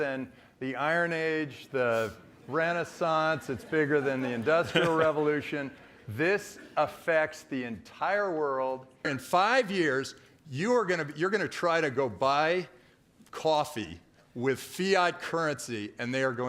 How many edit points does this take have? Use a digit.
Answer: 1